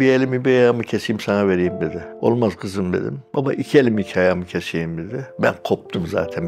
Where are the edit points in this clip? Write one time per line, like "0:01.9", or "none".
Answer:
0:02.0
0:05.2